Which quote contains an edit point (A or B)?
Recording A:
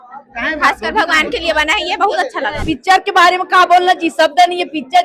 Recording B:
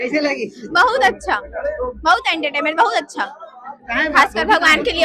A